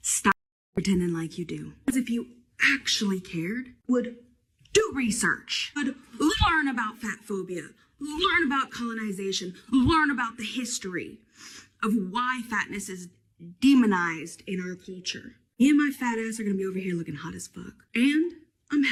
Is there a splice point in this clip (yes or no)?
no